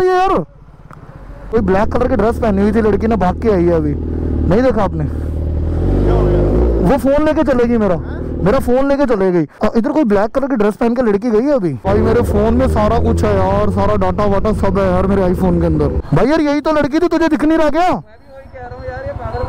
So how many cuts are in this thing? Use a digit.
4